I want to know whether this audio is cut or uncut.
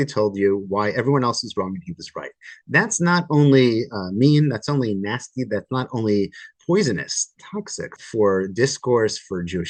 uncut